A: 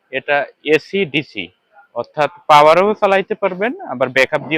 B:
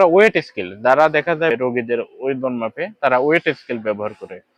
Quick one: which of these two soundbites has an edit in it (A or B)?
B